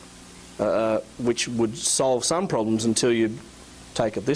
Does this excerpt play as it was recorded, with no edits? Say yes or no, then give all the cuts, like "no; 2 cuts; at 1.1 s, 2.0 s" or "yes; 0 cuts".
no; 1 cut; at 1.8 s